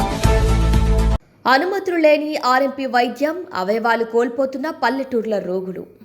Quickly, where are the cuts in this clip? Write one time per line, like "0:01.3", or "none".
0:01.0